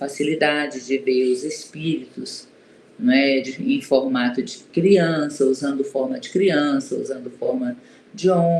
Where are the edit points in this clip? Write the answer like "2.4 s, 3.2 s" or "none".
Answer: none